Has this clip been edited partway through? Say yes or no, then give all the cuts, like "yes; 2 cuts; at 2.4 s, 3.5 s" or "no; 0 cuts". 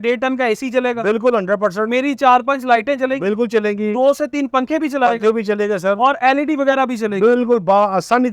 no; 0 cuts